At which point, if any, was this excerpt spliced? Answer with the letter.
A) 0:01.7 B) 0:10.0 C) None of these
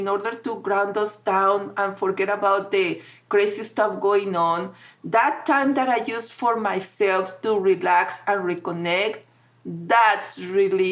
C